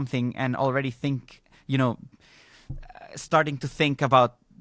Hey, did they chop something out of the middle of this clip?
no; 0 cuts

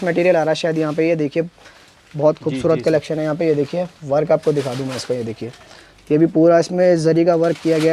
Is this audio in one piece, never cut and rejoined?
yes; 0 cuts

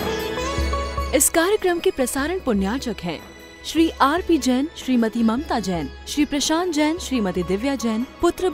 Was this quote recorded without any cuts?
no; 1 cut; at 1.0 s

